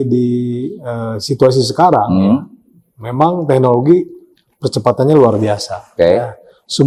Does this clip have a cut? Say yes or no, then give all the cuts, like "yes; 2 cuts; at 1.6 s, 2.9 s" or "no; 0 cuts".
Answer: no; 0 cuts